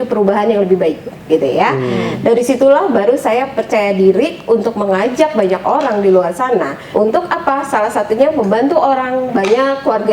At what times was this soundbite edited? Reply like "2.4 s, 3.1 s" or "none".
6.8 s